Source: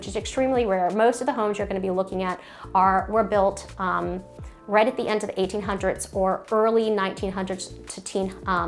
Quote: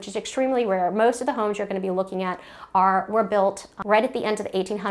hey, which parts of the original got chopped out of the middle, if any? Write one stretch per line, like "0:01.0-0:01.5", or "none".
0:03.7-0:04.5